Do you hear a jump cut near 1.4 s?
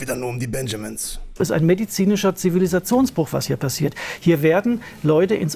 yes; 1 cut; at 1.4 s

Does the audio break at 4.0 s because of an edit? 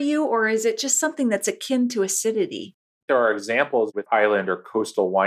yes; 2 cuts; at 3.0 s, 4.0 s

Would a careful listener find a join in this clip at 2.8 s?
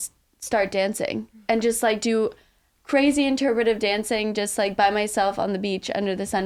no; 0 cuts

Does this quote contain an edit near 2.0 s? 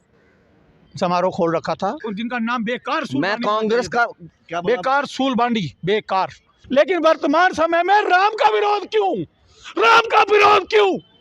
yes; 2 cuts; at 2.0 s, 6.5 s

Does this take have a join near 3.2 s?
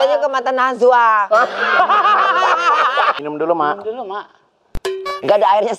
yes; 1 cut; at 3.2 s

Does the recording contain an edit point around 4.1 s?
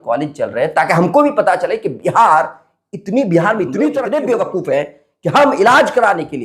yes; 1 cut; at 4.1 s

